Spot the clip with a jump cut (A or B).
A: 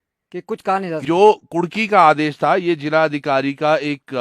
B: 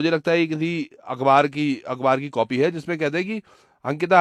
A